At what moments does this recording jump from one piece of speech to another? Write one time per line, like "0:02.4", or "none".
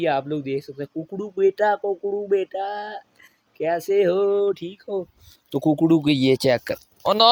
none